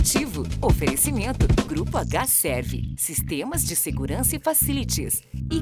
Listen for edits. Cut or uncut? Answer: uncut